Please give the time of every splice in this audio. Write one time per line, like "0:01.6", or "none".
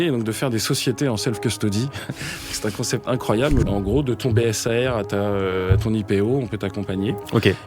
0:03.7